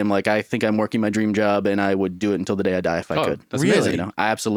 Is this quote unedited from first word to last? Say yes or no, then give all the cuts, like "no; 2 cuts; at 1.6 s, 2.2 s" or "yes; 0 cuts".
yes; 0 cuts